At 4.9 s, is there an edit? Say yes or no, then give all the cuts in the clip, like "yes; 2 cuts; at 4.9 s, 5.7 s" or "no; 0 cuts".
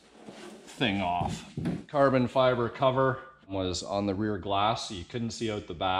no; 2 cuts; at 1.9 s, 3.5 s